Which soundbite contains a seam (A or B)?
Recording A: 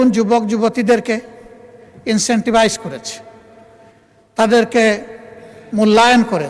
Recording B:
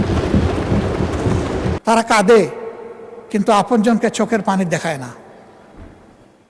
B